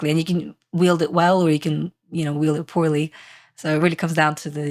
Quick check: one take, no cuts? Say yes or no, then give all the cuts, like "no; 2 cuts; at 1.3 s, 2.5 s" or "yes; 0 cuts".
yes; 0 cuts